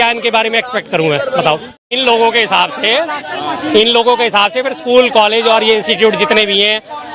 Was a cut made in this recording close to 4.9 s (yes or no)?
no